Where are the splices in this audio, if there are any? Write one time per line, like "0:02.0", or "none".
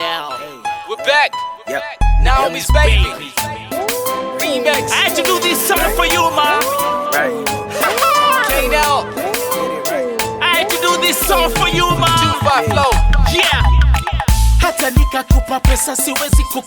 none